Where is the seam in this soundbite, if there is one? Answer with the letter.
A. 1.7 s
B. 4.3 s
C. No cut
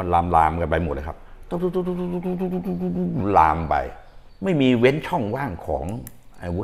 B